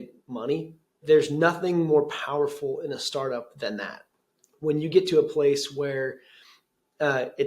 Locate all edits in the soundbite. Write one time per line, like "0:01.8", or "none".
0:01.0